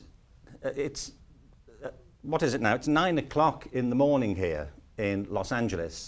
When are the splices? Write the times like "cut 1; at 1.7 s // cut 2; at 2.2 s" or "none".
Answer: cut 1; at 3.9 s

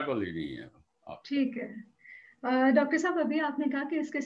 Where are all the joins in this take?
none

